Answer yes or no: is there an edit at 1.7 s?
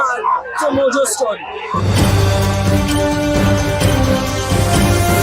yes